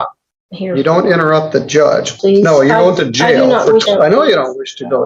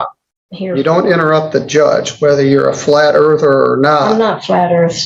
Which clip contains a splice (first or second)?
first